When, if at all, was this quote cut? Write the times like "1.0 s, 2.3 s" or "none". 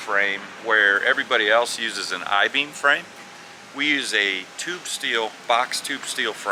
none